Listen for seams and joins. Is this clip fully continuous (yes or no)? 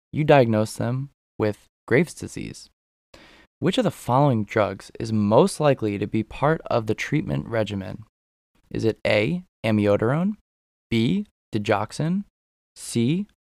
yes